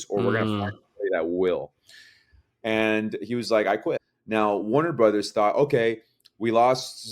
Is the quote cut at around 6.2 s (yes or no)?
no